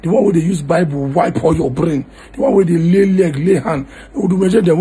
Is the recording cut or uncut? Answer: uncut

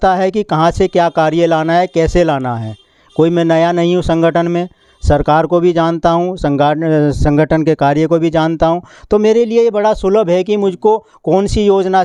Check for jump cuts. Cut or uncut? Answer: uncut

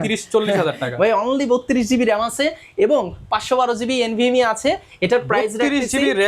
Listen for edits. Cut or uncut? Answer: uncut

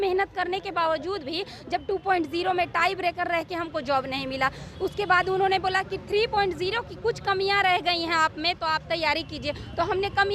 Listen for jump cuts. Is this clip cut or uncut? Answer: uncut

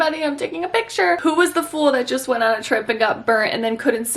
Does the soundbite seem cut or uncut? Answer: cut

